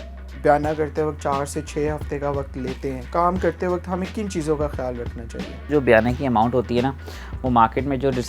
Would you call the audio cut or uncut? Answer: cut